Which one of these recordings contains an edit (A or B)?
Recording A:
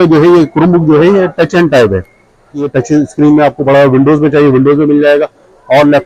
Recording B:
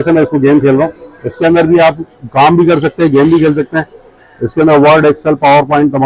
A